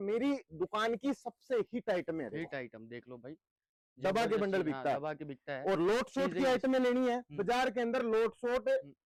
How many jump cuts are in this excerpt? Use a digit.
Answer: 0